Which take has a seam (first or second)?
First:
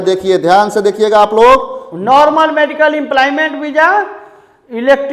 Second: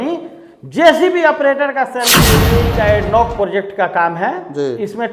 second